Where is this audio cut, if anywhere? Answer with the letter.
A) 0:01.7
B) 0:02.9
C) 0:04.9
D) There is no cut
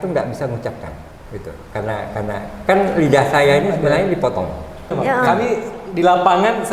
C